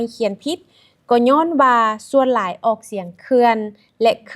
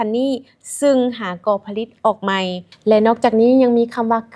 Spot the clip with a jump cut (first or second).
second